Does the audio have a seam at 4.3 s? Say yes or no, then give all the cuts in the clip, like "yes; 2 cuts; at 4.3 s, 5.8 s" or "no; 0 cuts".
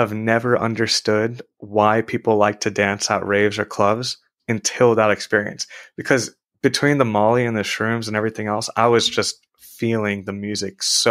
yes; 1 cut; at 4.3 s